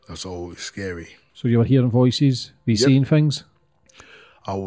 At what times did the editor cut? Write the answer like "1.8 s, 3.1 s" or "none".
1.2 s